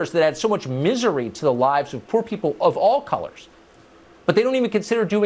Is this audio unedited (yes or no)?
yes